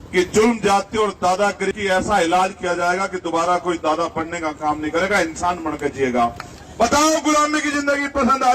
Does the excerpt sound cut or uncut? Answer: cut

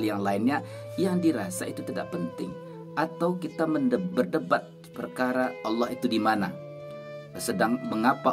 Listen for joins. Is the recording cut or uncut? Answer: uncut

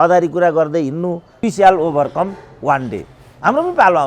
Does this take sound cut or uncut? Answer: cut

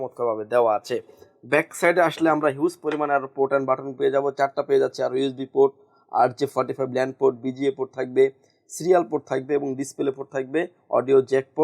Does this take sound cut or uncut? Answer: uncut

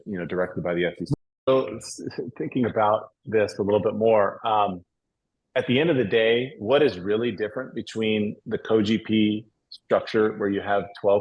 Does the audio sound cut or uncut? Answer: cut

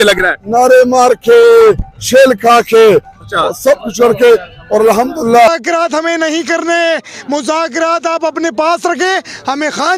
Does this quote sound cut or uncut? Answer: cut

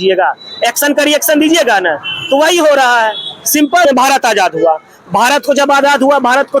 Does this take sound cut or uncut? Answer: cut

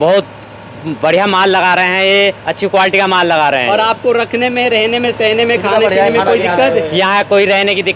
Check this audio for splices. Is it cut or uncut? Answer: uncut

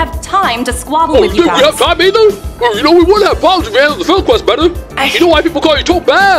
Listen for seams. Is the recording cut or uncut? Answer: uncut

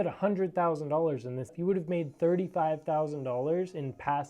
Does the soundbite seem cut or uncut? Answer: cut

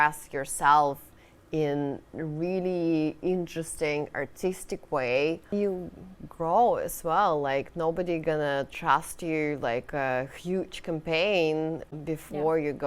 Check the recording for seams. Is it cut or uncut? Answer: cut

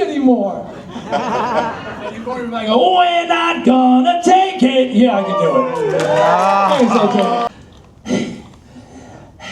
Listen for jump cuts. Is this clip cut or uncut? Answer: cut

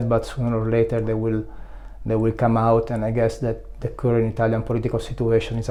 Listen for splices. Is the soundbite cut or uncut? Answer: uncut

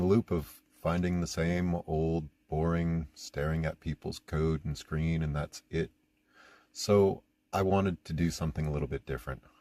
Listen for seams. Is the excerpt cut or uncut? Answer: uncut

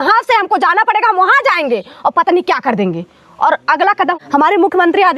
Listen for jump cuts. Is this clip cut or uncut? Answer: cut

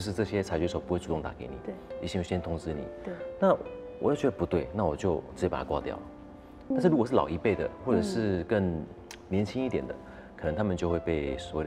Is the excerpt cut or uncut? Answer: cut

